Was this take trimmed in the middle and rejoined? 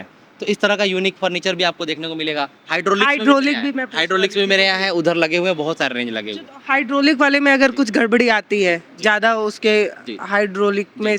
no; 0 cuts

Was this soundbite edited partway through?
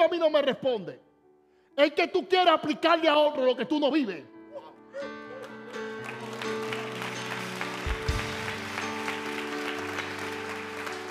no; 0 cuts

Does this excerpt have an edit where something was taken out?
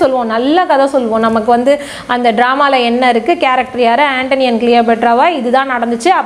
no; 0 cuts

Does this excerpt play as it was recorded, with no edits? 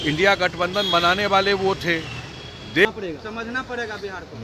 no; 1 cut; at 2.8 s

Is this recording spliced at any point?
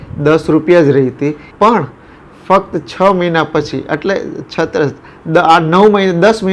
yes; 1 cut; at 1.4 s

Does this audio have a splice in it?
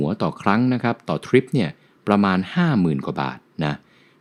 no; 0 cuts

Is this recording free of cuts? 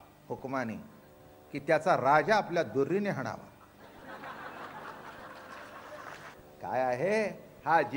no; 1 cut; at 6.3 s

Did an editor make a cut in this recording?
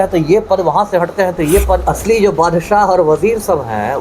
yes; 1 cut; at 1.8 s

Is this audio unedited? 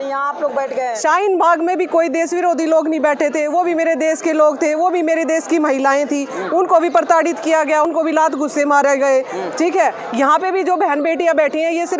yes; 0 cuts

